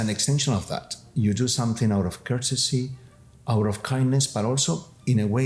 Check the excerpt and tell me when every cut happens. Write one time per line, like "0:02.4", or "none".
none